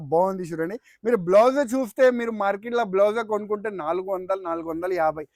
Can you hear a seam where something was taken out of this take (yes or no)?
no